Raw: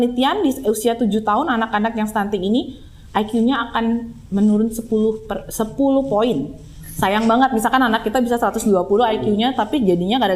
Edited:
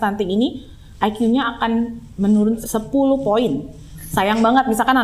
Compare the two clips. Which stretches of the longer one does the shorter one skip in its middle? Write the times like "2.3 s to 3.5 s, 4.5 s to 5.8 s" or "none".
4.8 s to 5.5 s